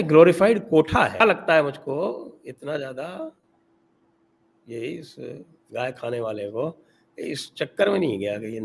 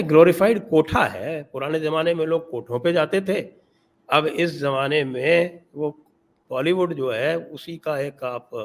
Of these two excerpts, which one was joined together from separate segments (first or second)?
first